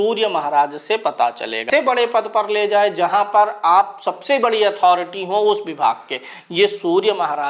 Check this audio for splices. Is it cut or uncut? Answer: cut